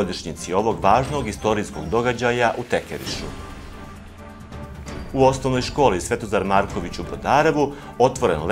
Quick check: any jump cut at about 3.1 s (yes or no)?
no